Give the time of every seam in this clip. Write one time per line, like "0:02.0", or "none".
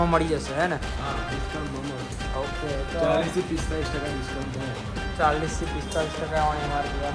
none